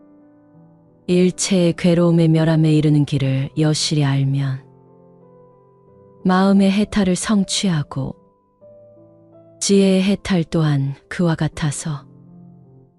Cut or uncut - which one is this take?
uncut